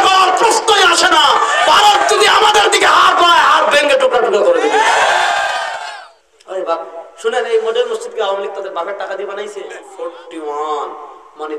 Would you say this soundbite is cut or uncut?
cut